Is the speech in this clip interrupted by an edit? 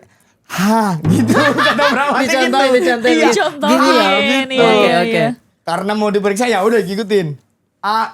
no; 0 cuts

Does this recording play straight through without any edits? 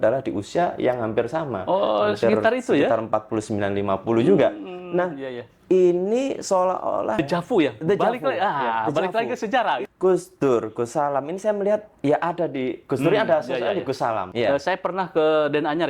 no; 3 cuts; at 7.2 s, 9.8 s, 14.3 s

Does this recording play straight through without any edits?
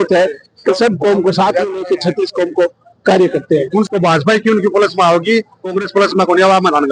no; 1 cut; at 3.9 s

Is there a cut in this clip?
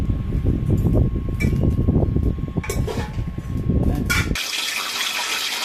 no; 0 cuts

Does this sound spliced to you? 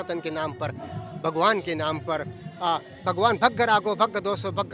no; 0 cuts

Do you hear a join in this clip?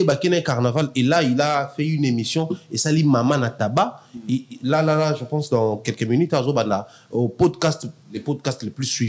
no; 0 cuts

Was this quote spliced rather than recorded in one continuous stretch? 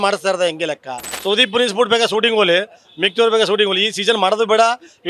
yes; 1 cut; at 1.1 s

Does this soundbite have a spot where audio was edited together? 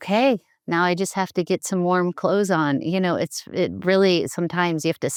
no; 0 cuts

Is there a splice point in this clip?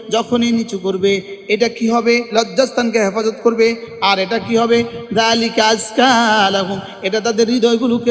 yes; 1 cut; at 2.3 s

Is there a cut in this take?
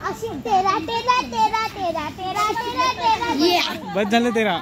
yes; 1 cut; at 3.7 s

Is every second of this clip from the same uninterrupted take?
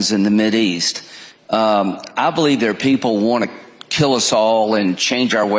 yes; 0 cuts

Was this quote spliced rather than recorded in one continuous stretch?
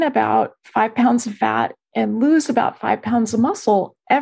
no; 0 cuts

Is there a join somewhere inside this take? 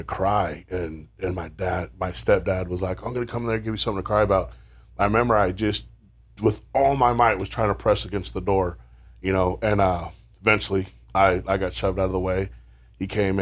no; 0 cuts

